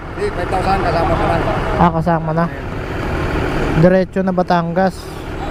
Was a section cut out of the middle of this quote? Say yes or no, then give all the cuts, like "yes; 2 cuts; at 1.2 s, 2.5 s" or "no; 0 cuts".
no; 0 cuts